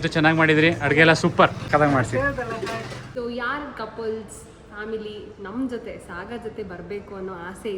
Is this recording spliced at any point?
yes; 2 cuts; at 1.6 s, 3.0 s

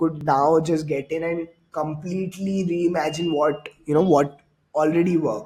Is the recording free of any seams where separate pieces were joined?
yes; 0 cuts

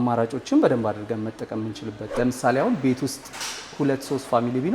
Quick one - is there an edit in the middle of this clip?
yes; 1 cut; at 1.9 s

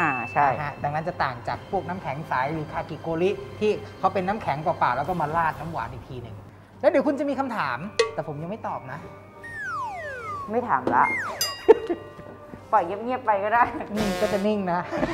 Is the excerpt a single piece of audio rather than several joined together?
no; 2 cuts; at 6.4 s, 8.0 s

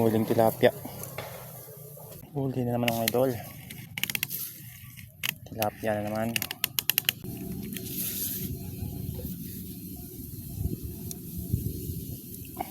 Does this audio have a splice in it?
yes; 2 cuts; at 2.2 s, 7.2 s

